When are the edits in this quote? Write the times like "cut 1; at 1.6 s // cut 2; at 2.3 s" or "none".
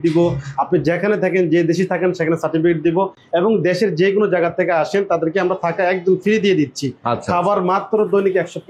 none